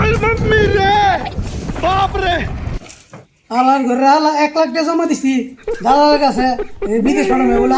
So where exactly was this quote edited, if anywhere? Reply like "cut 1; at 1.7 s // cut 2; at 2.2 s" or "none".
none

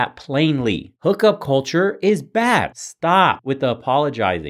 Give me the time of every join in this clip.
cut 1; at 1.0 s

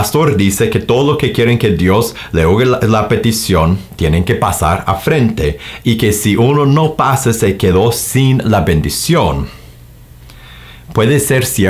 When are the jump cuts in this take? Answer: none

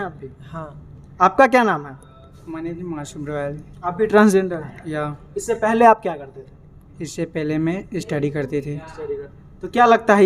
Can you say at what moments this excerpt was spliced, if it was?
none

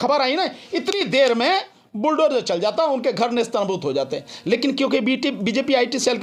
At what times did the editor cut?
none

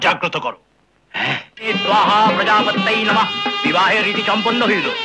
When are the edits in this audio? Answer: cut 1; at 1.6 s

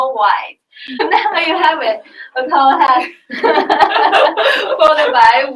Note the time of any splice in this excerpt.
cut 1; at 1.0 s

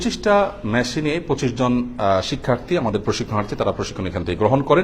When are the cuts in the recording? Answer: none

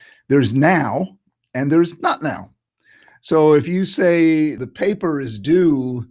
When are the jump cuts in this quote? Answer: cut 1; at 4.6 s

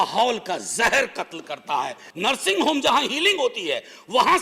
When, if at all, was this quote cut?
cut 1; at 2.0 s

